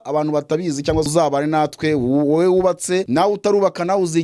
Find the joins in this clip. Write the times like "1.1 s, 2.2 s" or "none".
1.1 s, 3.1 s